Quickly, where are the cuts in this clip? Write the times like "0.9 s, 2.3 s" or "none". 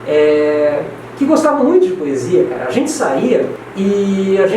3.6 s